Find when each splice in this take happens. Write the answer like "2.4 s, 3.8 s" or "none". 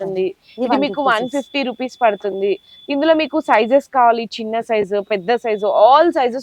none

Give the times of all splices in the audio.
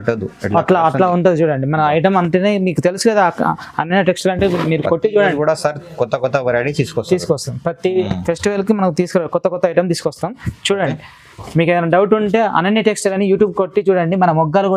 none

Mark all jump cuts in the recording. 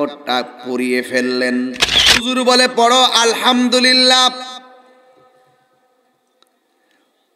2.2 s

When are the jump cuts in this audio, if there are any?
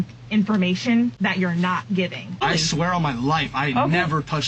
1.2 s, 2.4 s

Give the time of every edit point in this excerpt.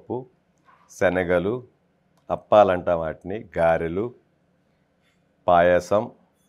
none

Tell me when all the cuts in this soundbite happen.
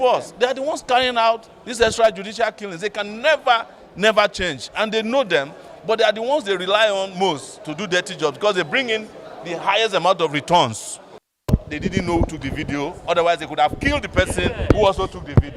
11.3 s

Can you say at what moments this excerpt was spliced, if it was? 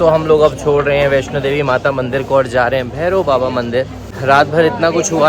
4.1 s

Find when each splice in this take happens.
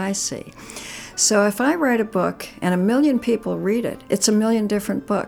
4.0 s

